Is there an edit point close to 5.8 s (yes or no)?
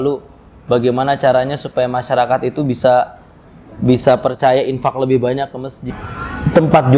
yes